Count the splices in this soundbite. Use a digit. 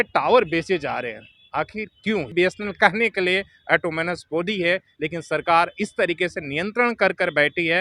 1